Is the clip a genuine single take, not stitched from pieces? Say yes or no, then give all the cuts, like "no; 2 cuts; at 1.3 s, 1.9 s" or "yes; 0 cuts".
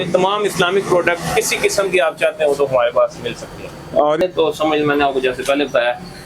no; 1 cut; at 4.2 s